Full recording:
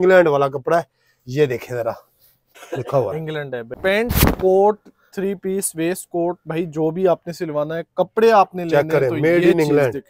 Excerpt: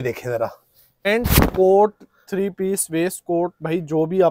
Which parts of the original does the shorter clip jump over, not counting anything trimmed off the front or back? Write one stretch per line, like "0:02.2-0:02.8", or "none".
0:02.5-0:03.9

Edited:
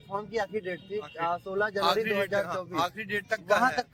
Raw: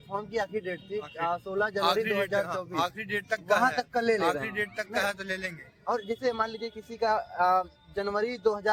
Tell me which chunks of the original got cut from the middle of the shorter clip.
none

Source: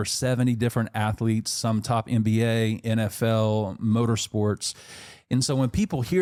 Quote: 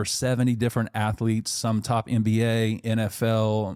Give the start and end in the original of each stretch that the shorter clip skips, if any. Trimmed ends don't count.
none

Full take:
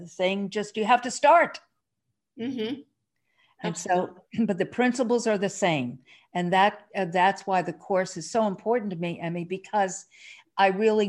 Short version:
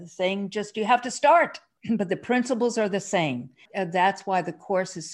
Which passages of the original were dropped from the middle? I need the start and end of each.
0:01.7-0:04.2
0:06.1-0:06.8

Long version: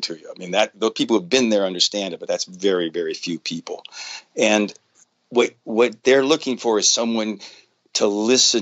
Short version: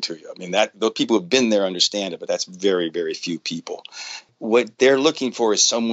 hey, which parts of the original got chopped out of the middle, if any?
0:04.3-0:05.5

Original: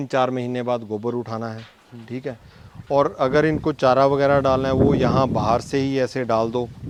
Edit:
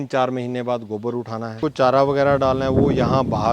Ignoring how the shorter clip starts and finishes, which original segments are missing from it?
0:01.6-0:03.6

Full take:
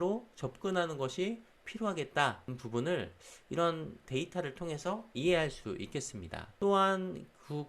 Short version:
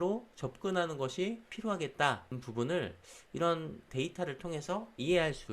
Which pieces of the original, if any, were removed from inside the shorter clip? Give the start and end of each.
0:01.5-0:01.6

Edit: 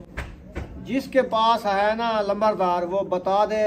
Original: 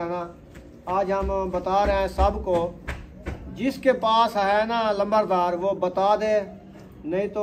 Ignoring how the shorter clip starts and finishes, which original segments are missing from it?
none

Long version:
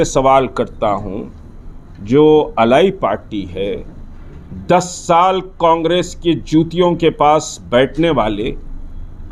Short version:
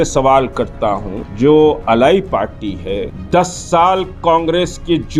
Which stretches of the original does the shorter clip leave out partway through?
0:01.2-0:01.9
0:03.8-0:04.5

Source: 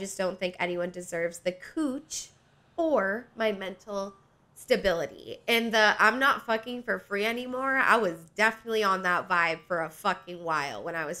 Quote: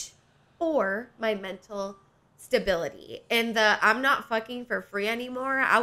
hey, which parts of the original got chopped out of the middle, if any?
none

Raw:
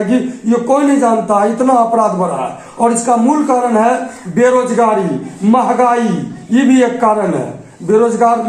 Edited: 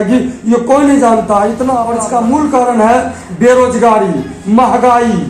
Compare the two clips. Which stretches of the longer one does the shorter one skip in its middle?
0:01.9-0:02.8

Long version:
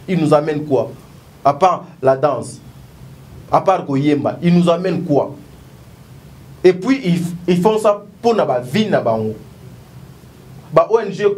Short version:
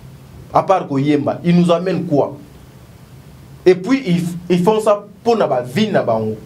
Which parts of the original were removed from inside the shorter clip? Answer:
none

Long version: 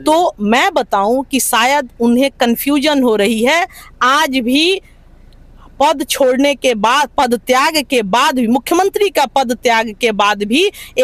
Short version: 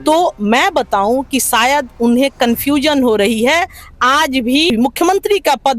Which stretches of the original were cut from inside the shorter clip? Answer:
0:04.7-0:08.4

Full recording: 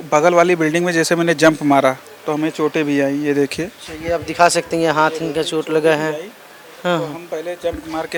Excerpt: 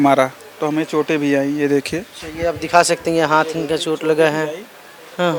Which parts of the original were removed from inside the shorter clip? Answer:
none

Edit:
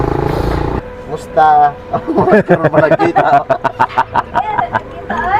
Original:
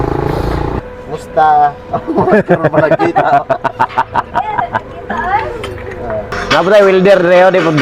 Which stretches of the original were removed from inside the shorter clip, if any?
none

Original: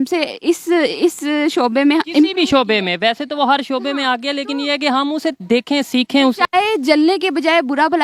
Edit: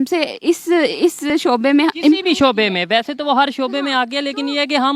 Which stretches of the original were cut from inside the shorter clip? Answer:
0:01.3-0:01.4

